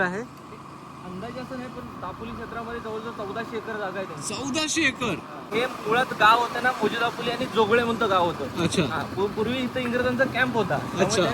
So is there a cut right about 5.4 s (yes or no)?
yes